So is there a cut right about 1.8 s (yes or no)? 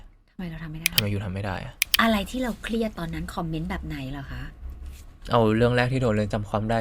yes